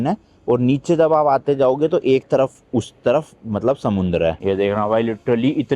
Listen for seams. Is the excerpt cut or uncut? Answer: cut